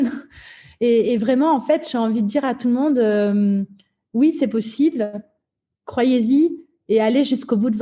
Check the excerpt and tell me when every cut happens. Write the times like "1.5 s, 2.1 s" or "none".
none